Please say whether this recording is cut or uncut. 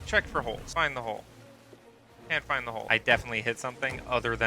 cut